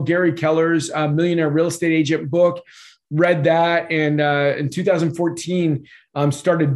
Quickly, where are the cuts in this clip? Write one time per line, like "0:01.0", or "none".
none